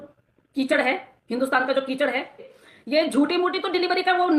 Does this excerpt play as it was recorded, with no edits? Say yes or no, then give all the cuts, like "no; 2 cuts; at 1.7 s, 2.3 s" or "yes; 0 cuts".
no; 1 cut; at 2.6 s